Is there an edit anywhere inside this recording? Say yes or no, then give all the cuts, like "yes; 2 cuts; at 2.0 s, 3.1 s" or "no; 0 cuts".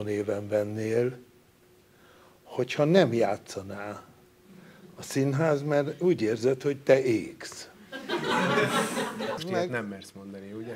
yes; 1 cut; at 9.4 s